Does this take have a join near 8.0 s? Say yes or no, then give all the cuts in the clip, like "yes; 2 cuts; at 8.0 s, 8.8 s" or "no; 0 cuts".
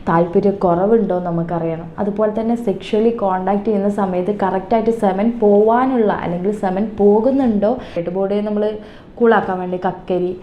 yes; 1 cut; at 8.0 s